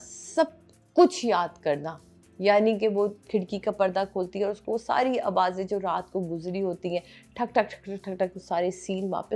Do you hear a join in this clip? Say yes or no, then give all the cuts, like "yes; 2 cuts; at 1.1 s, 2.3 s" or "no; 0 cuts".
no; 0 cuts